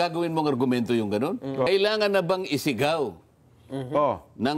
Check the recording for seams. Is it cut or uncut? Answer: cut